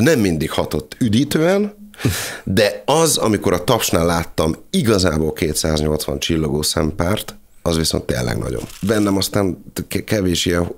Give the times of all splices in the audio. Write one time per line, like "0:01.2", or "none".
0:08.8